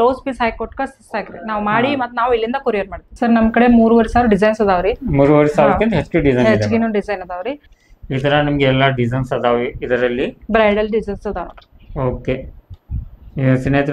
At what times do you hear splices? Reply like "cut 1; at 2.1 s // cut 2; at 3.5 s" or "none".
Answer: cut 1; at 3.0 s // cut 2; at 7.6 s